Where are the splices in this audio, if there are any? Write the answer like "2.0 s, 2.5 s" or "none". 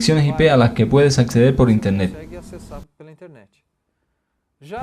none